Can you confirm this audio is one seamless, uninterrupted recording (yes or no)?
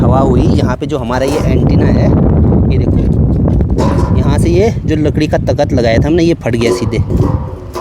yes